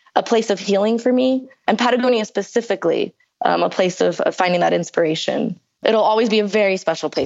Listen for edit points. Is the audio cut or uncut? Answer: cut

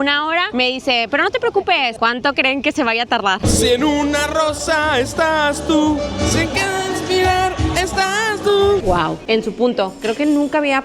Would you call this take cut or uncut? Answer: cut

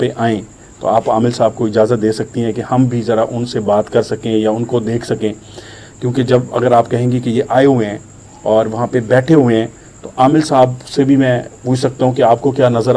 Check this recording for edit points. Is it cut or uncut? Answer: uncut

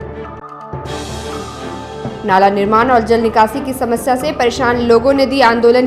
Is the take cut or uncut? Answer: uncut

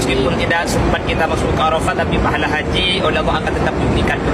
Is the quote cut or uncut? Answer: uncut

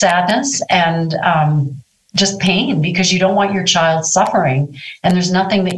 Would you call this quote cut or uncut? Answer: uncut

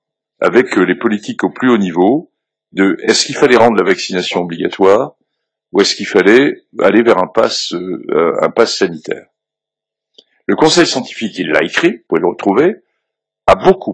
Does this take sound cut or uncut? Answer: uncut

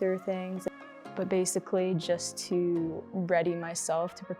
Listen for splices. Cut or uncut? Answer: cut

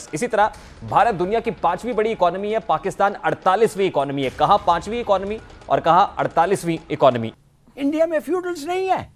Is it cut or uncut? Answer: cut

